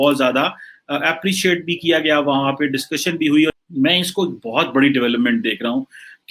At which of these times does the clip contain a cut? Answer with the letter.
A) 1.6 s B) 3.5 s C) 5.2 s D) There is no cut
B